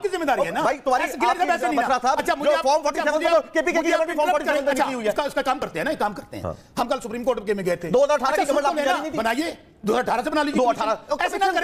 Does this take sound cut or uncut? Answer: uncut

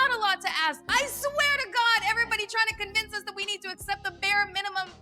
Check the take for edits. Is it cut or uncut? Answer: cut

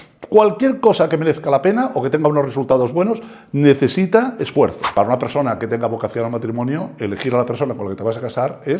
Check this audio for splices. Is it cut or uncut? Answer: cut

